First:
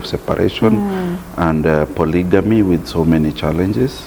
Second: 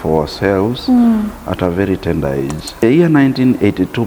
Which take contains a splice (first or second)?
second